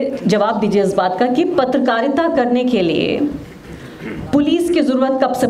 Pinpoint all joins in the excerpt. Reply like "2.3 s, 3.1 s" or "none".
none